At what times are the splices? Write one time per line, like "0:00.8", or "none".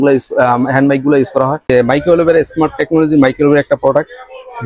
0:01.7